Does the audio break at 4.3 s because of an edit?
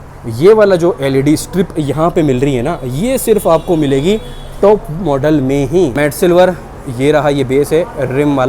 no; 1 cut; at 5.9 s

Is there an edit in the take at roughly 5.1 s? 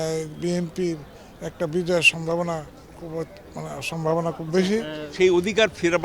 yes; 1 cut; at 5.1 s

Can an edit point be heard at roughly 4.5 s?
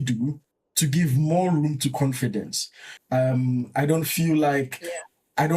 no; 1 cut; at 2.9 s

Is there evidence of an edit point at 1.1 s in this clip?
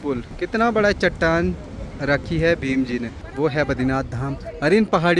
no; 1 cut; at 3.2 s

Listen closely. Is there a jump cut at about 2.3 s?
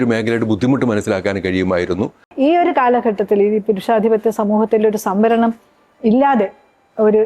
yes; 1 cut; at 2.3 s

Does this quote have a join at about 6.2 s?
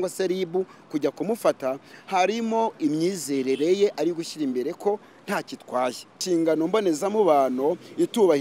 yes; 1 cut; at 6.2 s

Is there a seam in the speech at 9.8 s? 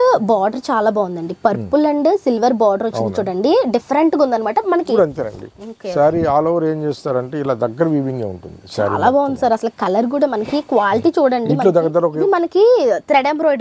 no; 2 cuts; at 4.9 s, 12.2 s

